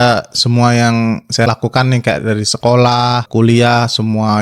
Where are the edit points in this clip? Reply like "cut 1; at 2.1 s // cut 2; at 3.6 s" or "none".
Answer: cut 1; at 1.5 s // cut 2; at 3.3 s